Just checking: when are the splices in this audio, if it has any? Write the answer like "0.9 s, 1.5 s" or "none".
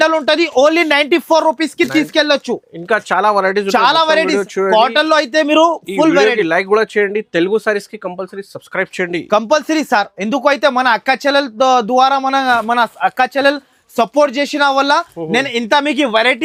none